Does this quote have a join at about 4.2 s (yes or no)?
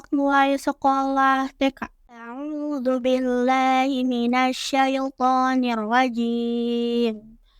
no